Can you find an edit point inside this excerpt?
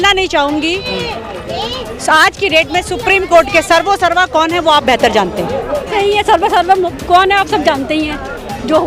yes; 1 cut; at 5.9 s

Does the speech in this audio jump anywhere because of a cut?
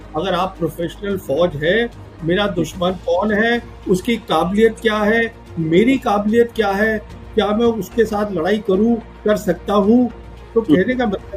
no; 0 cuts

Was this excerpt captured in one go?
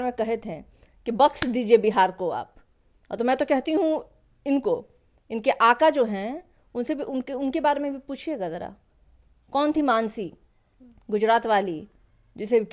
yes; 0 cuts

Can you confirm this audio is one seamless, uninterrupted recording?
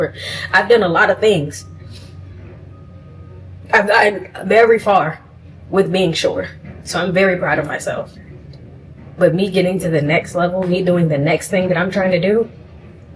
yes; 0 cuts

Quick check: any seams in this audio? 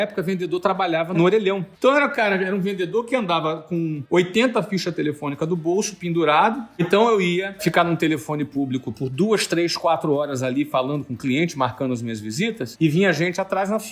yes; 5 cuts; at 1.7 s, 4.0 s, 6.9 s, 7.6 s, 12.7 s

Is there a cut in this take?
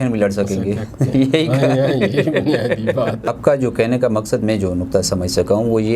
yes; 1 cut; at 3.3 s

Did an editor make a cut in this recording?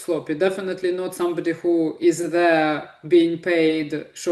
no; 0 cuts

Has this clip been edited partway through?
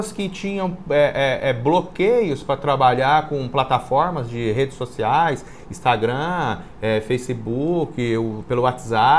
no; 0 cuts

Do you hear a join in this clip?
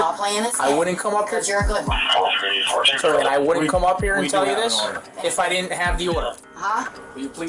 yes; 1 cut; at 6.5 s

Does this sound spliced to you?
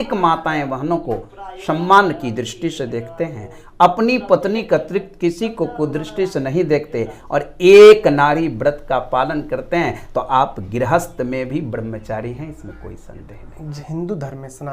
yes; 1 cut; at 13.8 s

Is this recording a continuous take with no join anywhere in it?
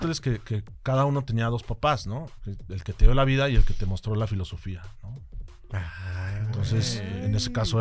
yes; 0 cuts

